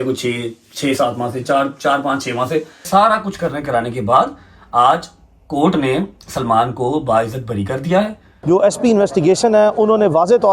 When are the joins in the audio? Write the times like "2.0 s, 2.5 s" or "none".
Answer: 2.9 s, 8.3 s